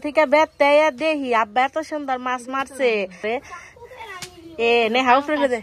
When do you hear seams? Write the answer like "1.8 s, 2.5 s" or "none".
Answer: 3.2 s